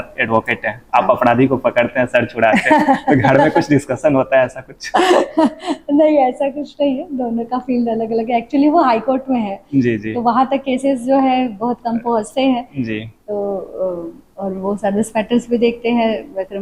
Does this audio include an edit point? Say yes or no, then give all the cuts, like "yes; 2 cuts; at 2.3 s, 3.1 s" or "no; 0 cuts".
no; 0 cuts